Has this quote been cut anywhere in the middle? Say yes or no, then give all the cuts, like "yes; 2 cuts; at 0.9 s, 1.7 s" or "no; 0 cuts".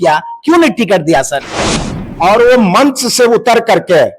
yes; 1 cut; at 1.9 s